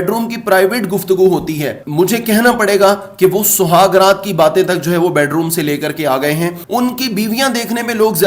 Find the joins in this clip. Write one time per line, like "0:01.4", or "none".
0:06.6